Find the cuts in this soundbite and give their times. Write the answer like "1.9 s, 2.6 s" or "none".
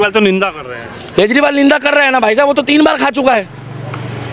none